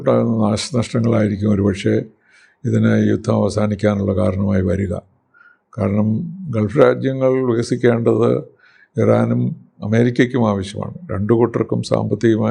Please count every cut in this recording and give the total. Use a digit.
0